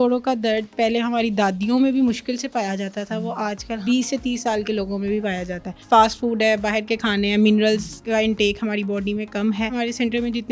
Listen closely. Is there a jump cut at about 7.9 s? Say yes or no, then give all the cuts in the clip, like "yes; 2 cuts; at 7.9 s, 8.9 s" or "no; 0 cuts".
yes; 4 cuts; at 3.8 s, 5.7 s, 7.9 s, 9.8 s